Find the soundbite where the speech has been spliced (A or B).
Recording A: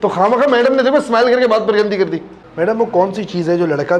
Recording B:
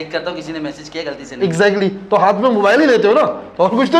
A